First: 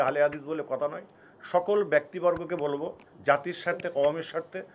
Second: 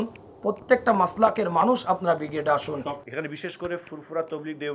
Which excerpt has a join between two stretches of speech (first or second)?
second